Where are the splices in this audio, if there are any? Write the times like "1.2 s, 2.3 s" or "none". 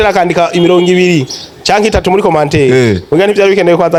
none